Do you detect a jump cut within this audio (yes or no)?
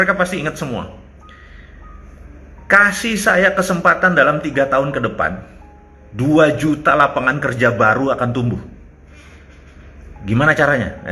no